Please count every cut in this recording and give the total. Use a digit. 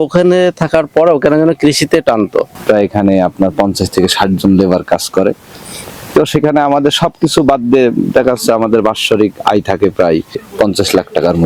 2